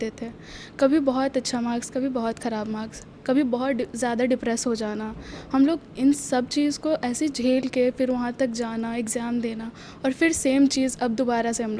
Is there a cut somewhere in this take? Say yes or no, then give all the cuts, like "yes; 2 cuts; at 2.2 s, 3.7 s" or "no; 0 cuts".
no; 0 cuts